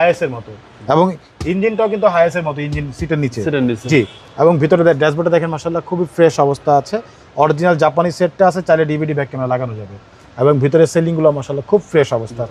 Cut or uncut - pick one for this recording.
uncut